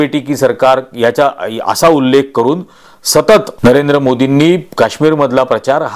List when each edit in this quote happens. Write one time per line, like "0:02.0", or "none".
0:03.5

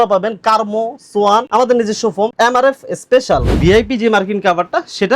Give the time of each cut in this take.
0:01.5
0:02.3
0:03.5

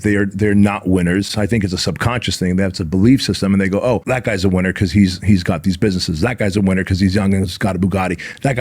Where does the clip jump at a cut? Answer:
0:04.0

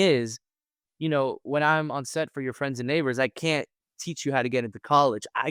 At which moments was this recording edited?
none

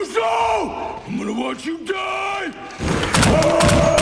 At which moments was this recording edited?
0:01.0
0:03.2

